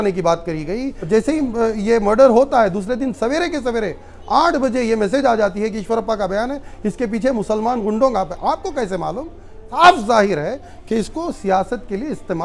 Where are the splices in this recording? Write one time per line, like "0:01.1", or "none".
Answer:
0:00.9
0:09.8